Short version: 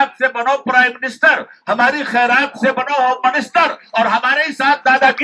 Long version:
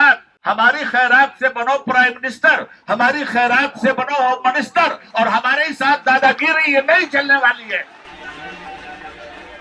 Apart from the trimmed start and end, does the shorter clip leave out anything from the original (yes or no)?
no